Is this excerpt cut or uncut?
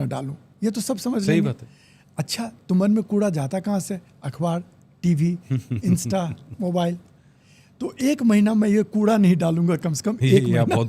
uncut